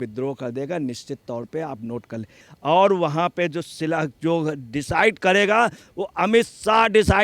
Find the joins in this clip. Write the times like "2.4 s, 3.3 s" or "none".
2.4 s